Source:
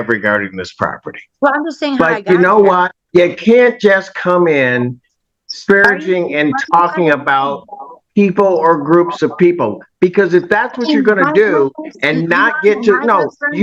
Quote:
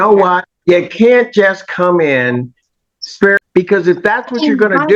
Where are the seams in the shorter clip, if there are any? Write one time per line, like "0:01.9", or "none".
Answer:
0:03.4